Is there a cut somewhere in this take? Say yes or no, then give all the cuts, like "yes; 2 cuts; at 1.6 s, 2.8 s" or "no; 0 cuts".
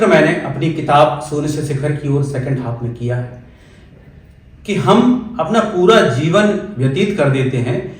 no; 0 cuts